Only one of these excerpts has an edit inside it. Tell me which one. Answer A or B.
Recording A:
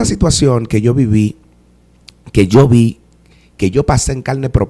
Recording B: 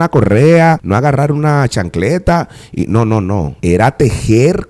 B